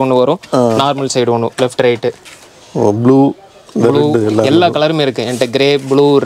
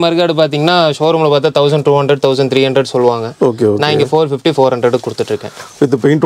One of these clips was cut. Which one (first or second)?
first